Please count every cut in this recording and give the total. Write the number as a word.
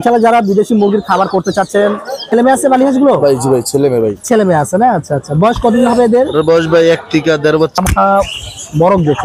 two